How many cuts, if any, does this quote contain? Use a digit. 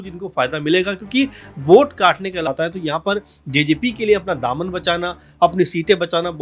1